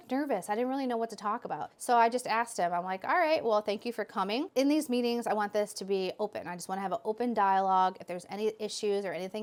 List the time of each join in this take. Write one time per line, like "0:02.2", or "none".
none